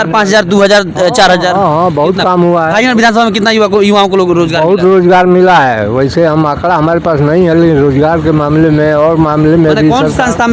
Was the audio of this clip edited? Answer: no; 0 cuts

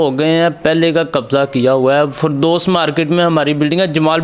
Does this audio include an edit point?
no; 0 cuts

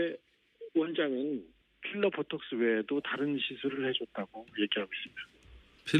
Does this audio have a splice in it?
no; 0 cuts

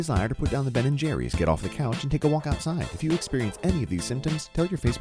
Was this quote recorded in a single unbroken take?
yes; 0 cuts

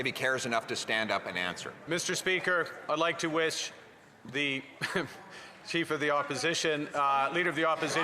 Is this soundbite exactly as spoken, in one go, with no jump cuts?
no; 1 cut; at 1.7 s

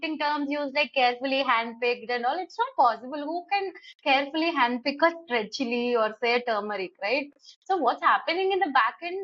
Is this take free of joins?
yes; 0 cuts

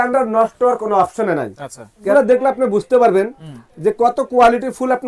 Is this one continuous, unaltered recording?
no; 1 cut; at 2.1 s

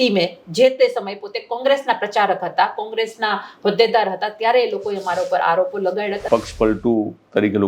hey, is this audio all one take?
no; 1 cut; at 6.2 s

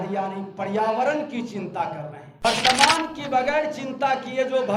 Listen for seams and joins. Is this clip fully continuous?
no; 1 cut; at 2.4 s

